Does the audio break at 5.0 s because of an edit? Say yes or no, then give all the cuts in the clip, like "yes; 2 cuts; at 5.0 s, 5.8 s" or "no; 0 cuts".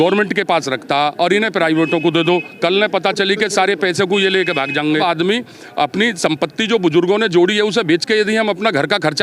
yes; 1 cut; at 5.0 s